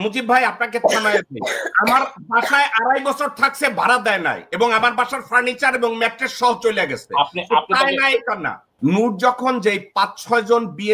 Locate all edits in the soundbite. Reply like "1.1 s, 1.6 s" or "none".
8.8 s